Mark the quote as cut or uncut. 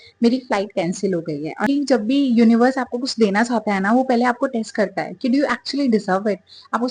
cut